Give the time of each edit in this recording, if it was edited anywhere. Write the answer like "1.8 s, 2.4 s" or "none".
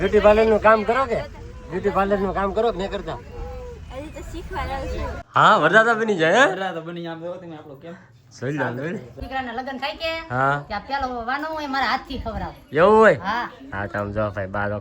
5.1 s, 9.2 s